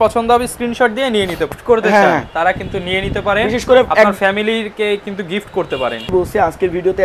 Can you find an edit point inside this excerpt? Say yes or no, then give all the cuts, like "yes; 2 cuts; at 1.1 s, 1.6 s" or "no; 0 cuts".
yes; 2 cuts; at 1.6 s, 6.1 s